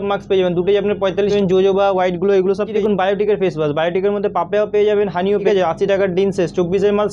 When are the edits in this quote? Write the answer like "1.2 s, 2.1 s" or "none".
1.3 s, 2.7 s, 5.4 s